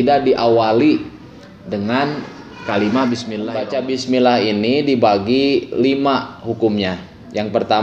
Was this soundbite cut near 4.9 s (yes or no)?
no